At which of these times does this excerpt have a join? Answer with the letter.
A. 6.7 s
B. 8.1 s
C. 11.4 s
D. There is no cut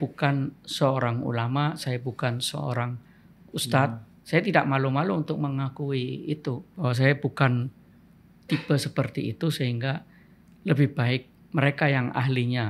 A